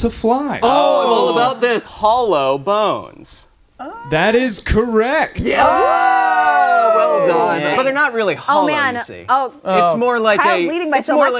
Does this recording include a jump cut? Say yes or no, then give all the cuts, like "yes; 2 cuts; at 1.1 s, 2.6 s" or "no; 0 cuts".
yes; 2 cuts; at 1.9 s, 7.7 s